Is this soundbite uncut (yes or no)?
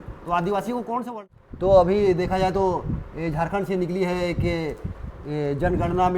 no